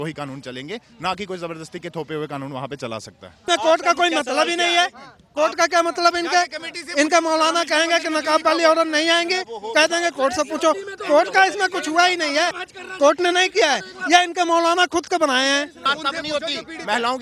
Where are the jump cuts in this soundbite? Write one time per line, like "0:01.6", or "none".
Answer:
0:03.5
0:12.6
0:16.0